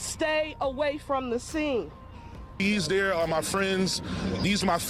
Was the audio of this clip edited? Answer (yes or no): no